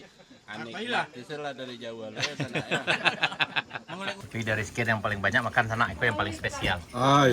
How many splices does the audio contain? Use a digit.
1